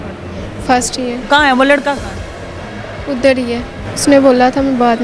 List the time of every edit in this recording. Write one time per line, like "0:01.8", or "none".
0:01.2
0:03.8